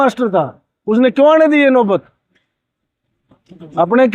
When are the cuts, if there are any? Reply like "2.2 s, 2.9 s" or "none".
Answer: none